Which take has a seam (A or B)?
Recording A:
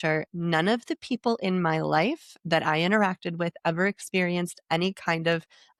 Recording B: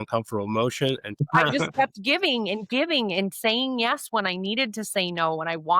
B